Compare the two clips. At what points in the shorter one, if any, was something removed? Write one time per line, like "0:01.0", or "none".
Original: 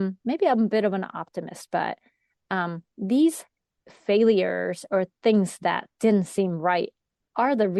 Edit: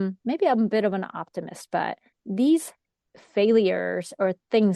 0:02.1

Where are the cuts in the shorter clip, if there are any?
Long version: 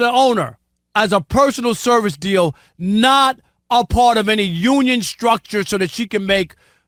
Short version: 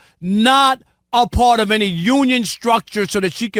none

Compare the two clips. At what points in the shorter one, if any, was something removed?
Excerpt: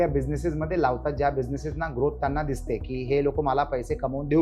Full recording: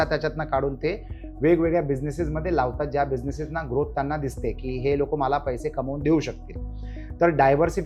none

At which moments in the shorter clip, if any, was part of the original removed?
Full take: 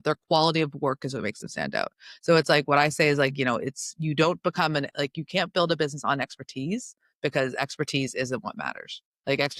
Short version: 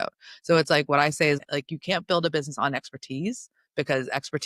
0:01.4

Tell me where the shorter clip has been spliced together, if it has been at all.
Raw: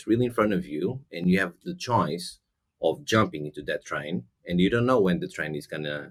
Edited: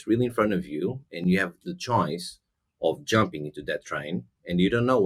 none

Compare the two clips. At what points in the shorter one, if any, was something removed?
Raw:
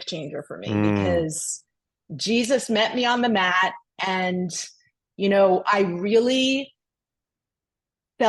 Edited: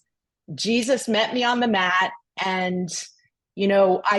none

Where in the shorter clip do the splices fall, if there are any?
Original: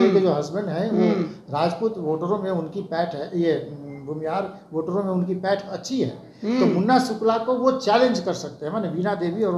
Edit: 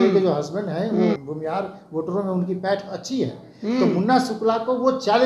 0:01.2

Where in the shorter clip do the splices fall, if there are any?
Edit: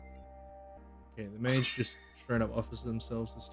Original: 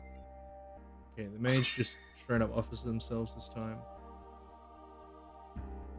none

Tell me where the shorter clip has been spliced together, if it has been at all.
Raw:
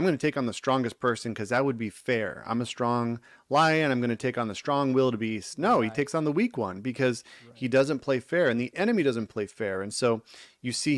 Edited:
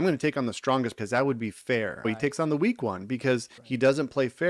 0:01.0
0:02.1
0:03.6

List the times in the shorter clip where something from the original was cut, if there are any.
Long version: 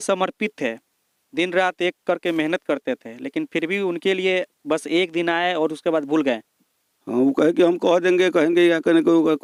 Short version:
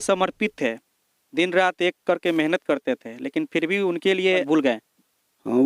0:04.4

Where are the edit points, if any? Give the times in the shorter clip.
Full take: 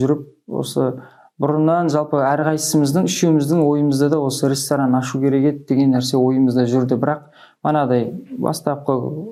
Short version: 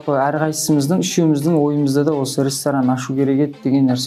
none

